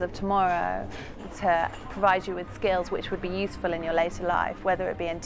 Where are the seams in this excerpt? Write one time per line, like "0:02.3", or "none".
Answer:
0:01.2